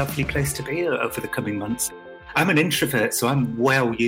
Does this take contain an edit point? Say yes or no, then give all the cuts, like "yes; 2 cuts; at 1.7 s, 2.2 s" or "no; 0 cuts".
yes; 1 cut; at 2.0 s